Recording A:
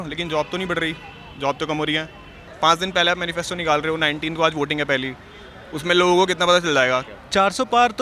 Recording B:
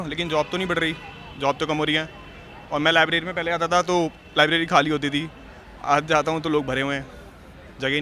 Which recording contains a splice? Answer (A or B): A